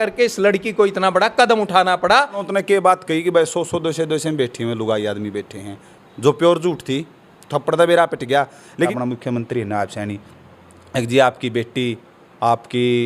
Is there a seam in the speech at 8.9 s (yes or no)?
yes